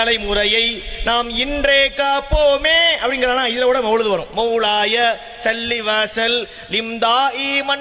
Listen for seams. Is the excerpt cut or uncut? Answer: uncut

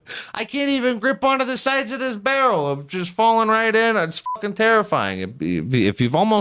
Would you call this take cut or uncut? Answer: uncut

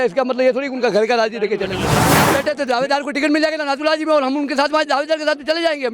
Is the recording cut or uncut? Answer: cut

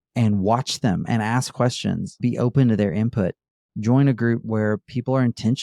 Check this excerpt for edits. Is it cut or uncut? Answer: cut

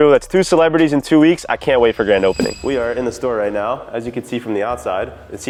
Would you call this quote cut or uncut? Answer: uncut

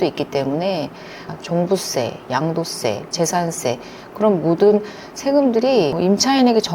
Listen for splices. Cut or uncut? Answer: cut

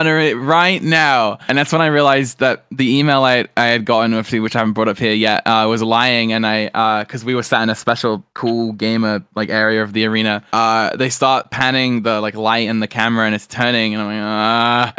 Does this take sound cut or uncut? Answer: uncut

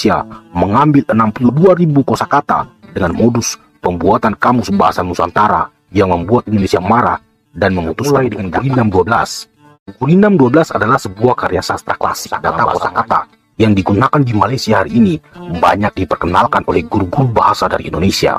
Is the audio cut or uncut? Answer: cut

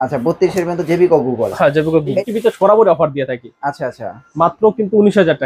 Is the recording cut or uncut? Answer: cut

